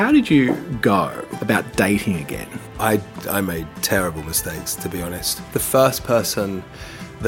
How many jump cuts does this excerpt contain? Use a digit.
3